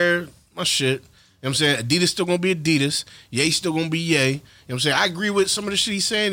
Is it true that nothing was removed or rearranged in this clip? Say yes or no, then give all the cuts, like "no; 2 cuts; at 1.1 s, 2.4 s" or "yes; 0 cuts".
yes; 0 cuts